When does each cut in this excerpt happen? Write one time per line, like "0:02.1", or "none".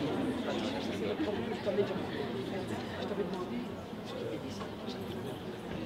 none

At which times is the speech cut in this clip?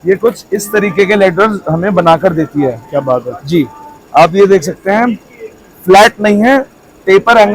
none

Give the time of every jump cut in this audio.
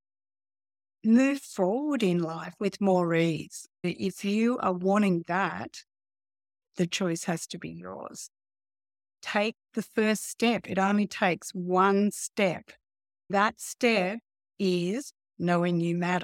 0:03.9
0:13.3

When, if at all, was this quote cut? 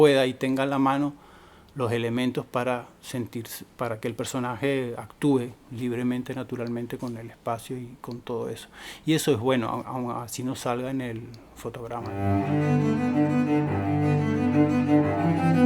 0:12.1

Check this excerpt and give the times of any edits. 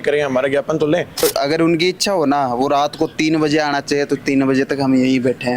0:01.2

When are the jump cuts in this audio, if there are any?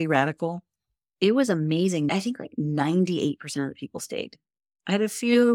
0:02.1

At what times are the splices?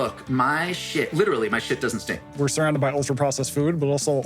0:02.3

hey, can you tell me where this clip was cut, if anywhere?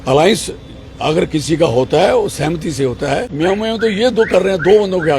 0:03.3

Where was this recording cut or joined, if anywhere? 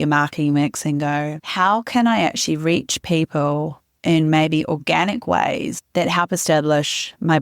none

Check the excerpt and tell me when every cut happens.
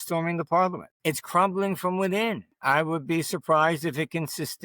0:00.9
0:02.5

